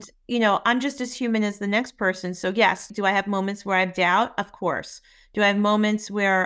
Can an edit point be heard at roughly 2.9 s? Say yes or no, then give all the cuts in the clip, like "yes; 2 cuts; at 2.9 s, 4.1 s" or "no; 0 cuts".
yes; 1 cut; at 2.9 s